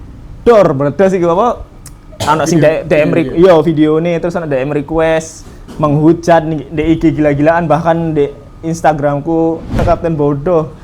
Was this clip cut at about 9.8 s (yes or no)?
yes